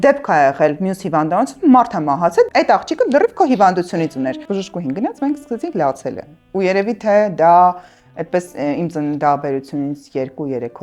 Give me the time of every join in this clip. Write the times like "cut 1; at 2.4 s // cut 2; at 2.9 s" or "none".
cut 1; at 2.5 s // cut 2; at 4.4 s